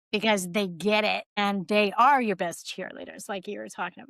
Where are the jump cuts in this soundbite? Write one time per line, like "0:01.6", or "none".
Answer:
0:01.3